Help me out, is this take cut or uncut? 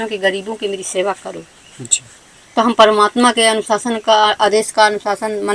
uncut